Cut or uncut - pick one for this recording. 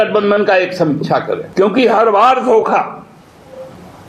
uncut